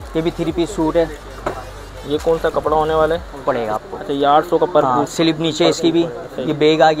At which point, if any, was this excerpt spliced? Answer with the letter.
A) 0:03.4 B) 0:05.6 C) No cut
A